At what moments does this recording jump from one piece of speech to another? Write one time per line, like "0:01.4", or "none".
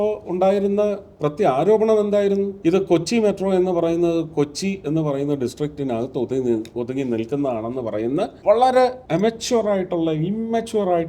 0:02.5
0:08.4
0:09.0

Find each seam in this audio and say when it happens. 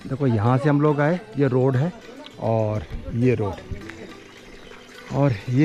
none

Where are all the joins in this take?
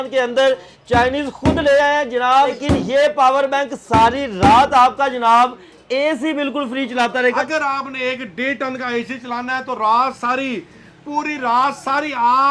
0:02.6
0:07.4

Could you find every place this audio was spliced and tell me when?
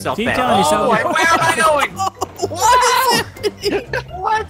none

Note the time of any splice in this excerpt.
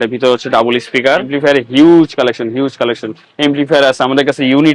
0:01.3

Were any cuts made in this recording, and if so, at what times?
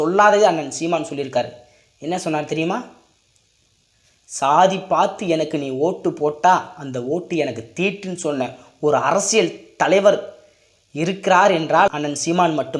0:11.9

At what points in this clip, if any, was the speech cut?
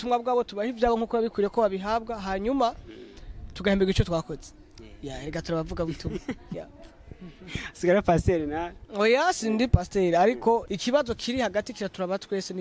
0:10.7

